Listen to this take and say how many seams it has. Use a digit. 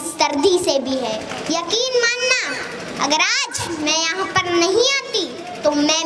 1